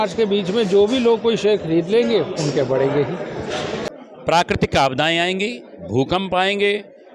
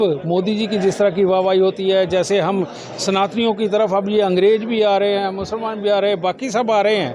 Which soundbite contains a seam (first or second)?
first